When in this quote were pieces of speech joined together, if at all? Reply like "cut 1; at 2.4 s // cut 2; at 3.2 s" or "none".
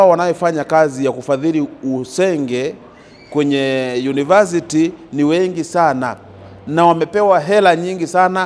none